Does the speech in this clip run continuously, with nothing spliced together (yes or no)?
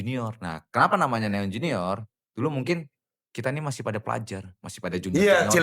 yes